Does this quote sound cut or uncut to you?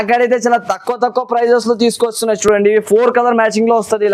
uncut